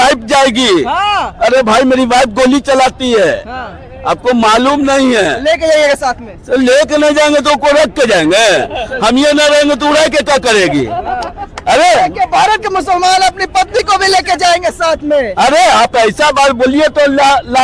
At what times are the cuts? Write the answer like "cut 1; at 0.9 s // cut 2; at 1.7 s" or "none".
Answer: none